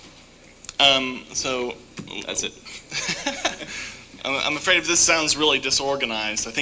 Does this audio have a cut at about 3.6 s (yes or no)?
yes